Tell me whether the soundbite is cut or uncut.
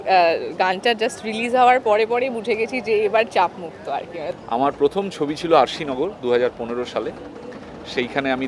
cut